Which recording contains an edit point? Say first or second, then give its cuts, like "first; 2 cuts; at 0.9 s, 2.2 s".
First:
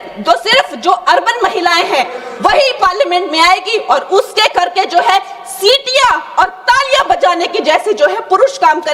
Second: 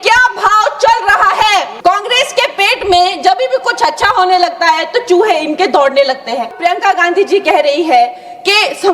second; 2 cuts; at 1.7 s, 6.5 s